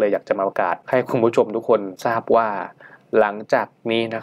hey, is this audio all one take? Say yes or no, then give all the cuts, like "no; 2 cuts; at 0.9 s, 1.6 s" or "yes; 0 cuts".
no; 2 cuts; at 0.8 s, 1.9 s